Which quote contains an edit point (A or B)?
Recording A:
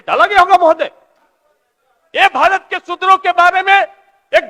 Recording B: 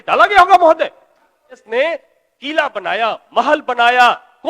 B